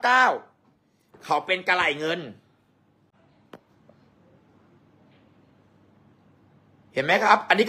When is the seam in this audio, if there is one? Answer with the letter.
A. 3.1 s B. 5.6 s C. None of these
A